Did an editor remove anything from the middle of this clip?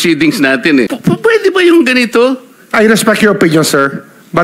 yes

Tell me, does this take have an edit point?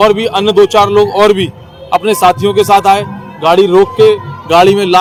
no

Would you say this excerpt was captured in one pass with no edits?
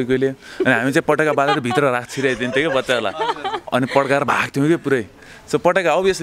yes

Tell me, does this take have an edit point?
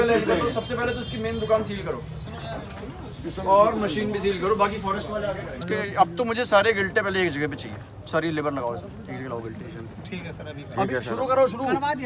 yes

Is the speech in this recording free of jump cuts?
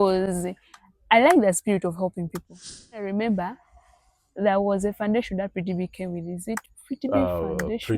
no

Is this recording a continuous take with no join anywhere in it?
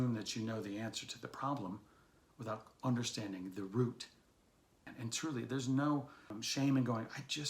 no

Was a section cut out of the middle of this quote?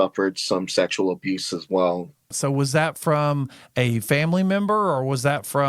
yes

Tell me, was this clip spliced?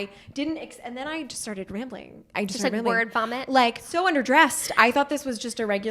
yes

